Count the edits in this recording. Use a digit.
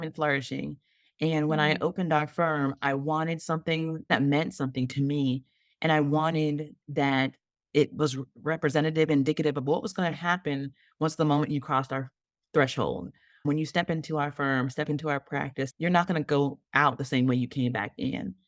3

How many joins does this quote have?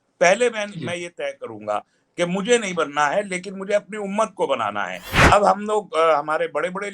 1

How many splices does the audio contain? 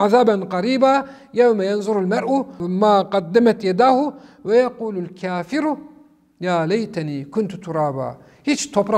1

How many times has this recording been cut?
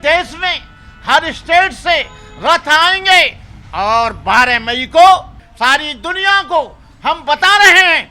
1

